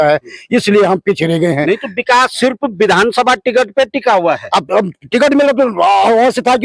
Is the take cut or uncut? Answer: uncut